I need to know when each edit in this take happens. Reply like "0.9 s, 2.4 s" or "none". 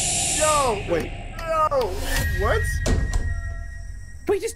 none